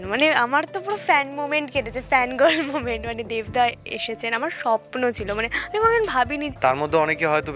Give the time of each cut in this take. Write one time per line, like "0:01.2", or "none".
0:06.5

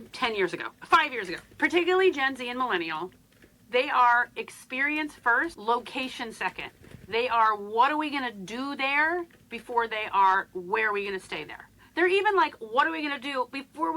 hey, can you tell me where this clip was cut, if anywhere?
0:01.4
0:05.6

